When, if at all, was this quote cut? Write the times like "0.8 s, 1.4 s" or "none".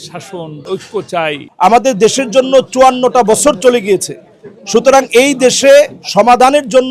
1.4 s